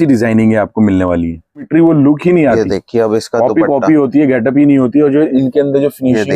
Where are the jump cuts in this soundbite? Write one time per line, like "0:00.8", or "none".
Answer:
0:01.7